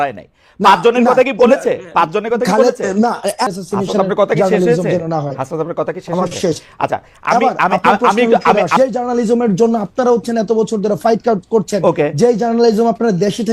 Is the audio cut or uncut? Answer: cut